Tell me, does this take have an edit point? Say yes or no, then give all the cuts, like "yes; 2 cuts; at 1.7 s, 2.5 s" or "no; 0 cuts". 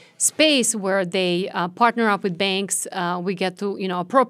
no; 0 cuts